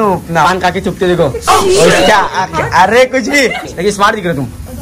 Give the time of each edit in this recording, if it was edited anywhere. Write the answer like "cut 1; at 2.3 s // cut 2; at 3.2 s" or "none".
cut 1; at 3.7 s